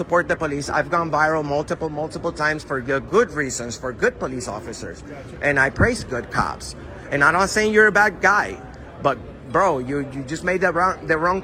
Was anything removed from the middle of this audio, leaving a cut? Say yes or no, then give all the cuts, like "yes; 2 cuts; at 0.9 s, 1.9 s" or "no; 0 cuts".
no; 0 cuts